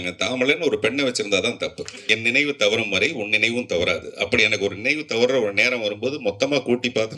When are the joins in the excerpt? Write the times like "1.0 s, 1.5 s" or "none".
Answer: 1.9 s